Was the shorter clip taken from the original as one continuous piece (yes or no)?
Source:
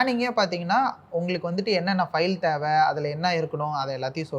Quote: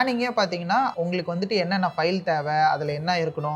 no